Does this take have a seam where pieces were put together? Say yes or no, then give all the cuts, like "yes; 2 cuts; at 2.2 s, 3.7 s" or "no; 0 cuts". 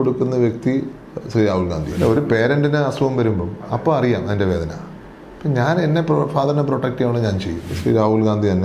yes; 2 cuts; at 1.9 s, 7.7 s